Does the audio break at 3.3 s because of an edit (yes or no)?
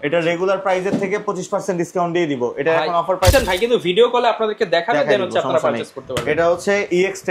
yes